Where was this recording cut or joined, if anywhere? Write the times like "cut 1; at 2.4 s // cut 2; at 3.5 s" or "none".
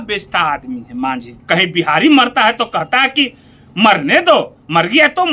cut 1; at 1.3 s